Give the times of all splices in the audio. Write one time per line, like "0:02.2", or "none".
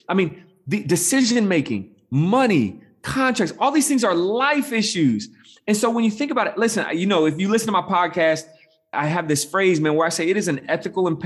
0:08.9

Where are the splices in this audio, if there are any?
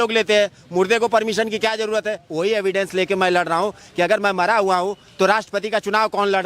0:02.2

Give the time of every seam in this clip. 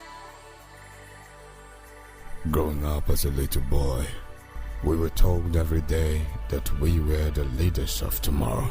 0:01.1

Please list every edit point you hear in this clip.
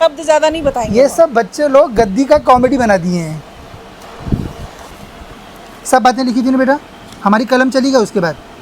0:05.0

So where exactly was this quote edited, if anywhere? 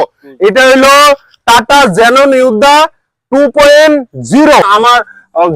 0:04.6

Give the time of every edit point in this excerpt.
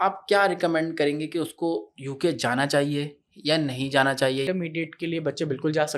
0:04.4

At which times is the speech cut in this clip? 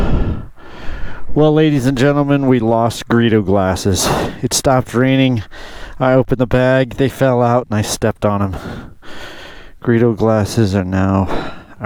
none

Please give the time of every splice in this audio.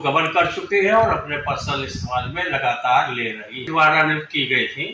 0:03.7

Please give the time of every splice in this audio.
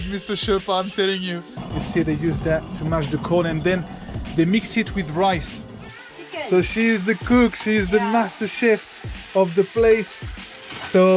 0:01.7
0:06.0

